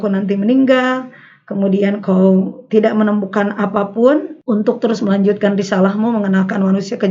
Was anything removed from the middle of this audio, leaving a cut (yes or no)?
yes